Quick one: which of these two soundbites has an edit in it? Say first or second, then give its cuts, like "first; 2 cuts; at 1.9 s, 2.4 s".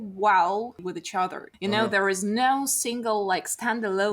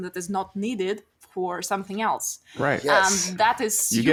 first; 1 cut; at 1.0 s